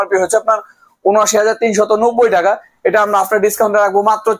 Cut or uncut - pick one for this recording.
uncut